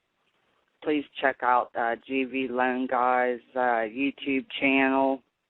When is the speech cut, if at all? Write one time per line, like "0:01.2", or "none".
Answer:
0:02.3